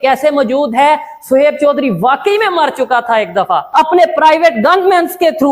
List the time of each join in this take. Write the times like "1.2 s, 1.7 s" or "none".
3.6 s